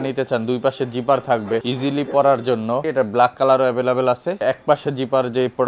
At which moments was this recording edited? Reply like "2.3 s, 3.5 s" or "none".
1.7 s, 2.8 s, 4.4 s